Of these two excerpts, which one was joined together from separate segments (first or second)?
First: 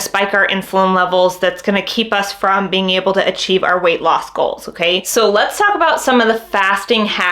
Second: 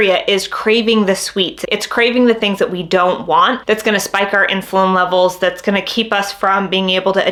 first